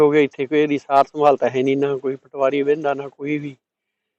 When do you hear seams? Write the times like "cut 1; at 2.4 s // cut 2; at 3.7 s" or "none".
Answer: none